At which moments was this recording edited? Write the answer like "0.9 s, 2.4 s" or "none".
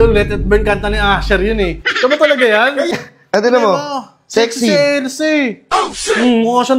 2.9 s